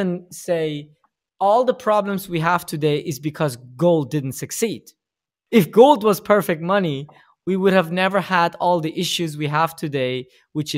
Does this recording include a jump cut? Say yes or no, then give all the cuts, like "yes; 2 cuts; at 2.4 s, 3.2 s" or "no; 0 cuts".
no; 0 cuts